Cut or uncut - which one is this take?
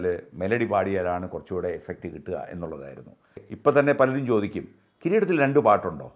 cut